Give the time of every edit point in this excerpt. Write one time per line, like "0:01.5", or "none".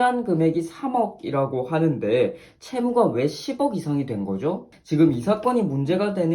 0:04.7